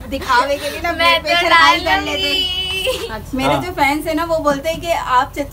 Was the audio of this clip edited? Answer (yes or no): yes